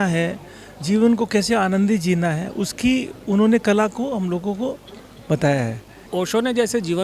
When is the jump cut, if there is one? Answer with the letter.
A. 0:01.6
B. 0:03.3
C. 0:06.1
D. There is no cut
C